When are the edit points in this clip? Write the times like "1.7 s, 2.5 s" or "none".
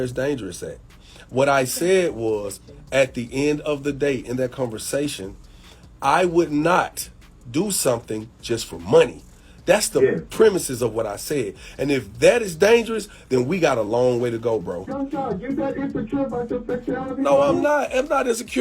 14.9 s